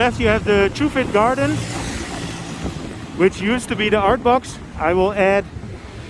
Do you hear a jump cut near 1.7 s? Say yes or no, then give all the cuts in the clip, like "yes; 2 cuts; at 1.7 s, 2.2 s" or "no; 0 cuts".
no; 0 cuts